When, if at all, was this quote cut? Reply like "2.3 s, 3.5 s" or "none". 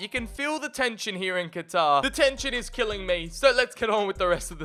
none